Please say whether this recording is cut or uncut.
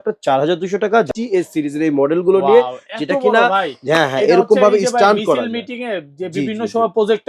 cut